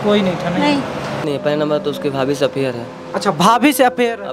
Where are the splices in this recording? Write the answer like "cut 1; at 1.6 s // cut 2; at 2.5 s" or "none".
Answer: cut 1; at 1.2 s